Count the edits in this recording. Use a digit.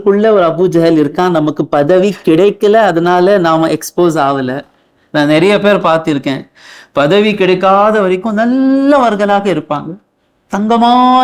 0